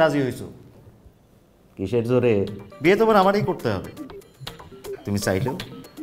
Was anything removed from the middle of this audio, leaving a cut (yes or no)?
yes